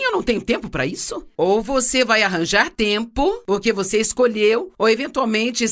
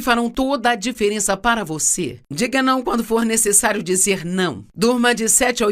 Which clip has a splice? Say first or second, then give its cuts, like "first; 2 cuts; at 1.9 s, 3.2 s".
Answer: second; 1 cut; at 2.2 s